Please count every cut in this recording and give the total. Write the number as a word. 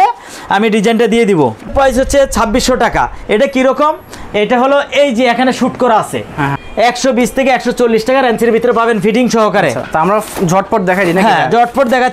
two